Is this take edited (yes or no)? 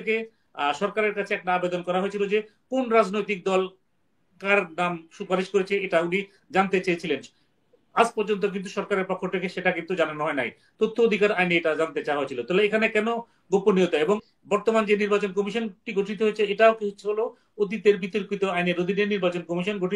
yes